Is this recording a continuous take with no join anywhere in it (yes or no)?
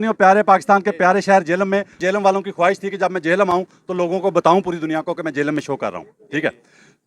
yes